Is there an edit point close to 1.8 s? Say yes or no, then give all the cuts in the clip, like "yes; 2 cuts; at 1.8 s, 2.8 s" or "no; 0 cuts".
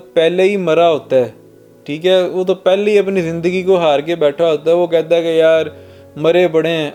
no; 0 cuts